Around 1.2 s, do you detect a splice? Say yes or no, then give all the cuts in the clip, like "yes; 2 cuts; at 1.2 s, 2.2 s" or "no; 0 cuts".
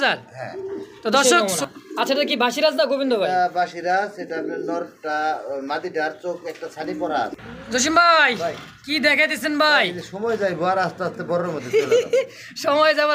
yes; 2 cuts; at 1.2 s, 7.3 s